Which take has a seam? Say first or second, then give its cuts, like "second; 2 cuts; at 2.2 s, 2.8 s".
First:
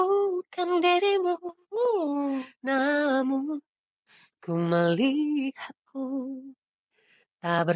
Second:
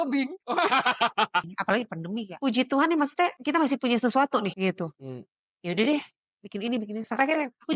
second; 3 cuts; at 1.9 s, 3.4 s, 4.5 s